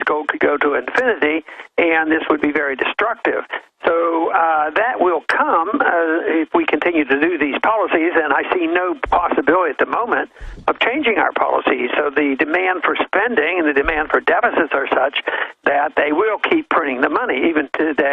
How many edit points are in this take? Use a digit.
1